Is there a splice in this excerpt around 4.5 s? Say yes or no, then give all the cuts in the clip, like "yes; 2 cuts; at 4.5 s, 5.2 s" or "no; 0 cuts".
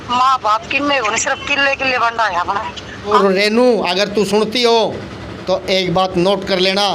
no; 1 cut; at 3.2 s